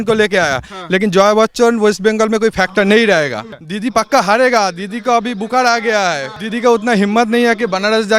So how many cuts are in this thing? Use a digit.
2